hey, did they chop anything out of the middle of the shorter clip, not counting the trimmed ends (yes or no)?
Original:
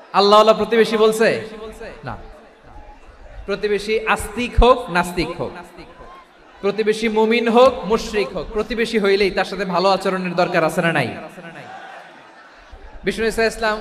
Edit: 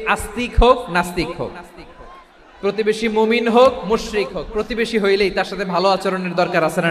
no